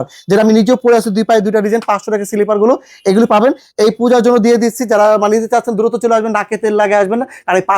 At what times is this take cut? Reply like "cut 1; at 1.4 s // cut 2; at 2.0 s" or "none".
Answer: none

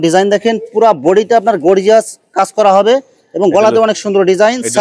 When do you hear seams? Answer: none

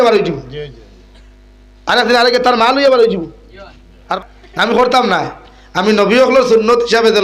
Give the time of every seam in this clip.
cut 1; at 4.2 s

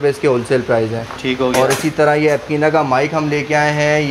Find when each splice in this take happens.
none

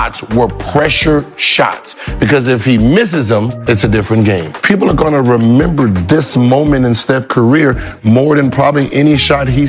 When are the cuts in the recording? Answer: cut 1; at 3.5 s // cut 2; at 4.5 s

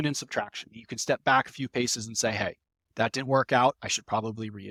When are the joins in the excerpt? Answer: none

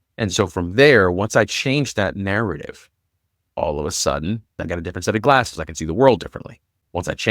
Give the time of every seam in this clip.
cut 1; at 4.5 s

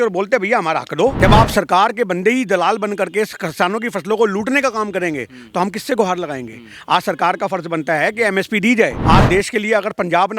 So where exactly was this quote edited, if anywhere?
cut 1; at 1.1 s // cut 2; at 9.0 s

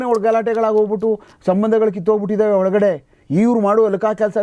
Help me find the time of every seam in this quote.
none

